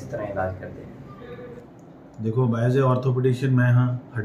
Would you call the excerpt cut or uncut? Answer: uncut